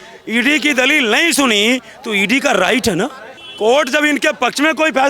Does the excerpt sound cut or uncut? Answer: cut